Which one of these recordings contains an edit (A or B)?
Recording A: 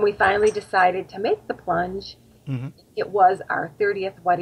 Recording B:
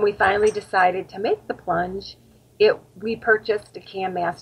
A